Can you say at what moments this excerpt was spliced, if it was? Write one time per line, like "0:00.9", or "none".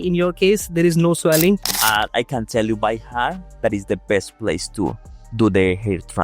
0:01.7